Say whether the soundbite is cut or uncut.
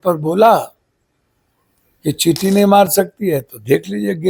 uncut